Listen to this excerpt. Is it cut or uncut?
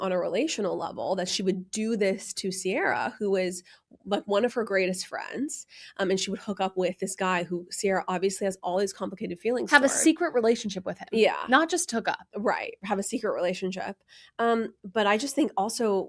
uncut